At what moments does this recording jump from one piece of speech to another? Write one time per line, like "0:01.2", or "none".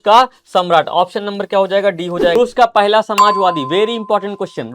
0:02.4